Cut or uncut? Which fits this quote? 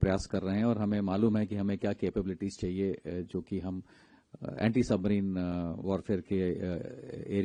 uncut